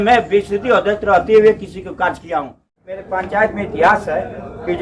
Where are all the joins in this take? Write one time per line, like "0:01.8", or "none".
0:03.0